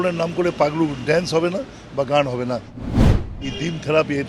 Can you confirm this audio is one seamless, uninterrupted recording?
no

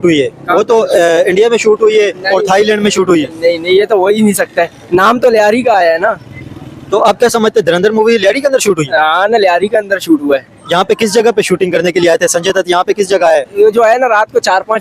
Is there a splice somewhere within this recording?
no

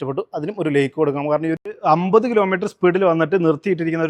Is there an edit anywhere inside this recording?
yes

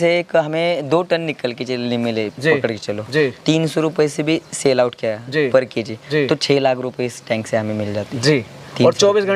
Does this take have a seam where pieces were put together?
no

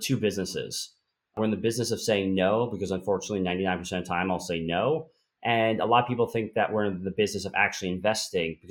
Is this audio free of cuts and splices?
no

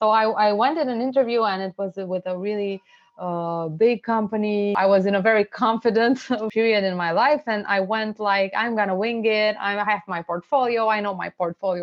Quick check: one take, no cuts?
no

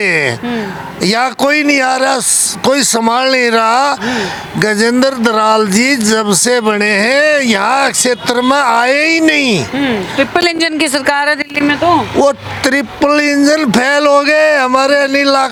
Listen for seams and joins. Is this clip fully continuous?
yes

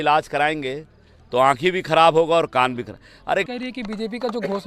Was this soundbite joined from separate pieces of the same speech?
yes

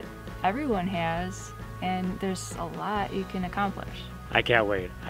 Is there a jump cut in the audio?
yes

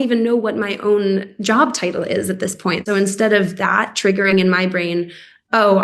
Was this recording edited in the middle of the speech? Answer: yes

